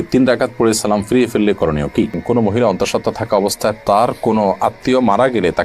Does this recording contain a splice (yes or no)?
yes